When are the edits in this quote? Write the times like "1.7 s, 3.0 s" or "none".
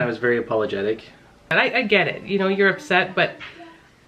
1.5 s